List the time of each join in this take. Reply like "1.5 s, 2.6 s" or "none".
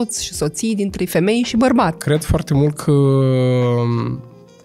2.0 s